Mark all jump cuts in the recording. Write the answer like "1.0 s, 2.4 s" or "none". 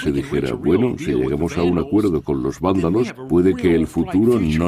2.9 s